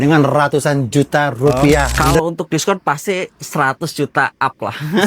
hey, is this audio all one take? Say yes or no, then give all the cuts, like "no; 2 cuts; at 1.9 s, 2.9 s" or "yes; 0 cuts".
no; 1 cut; at 2.2 s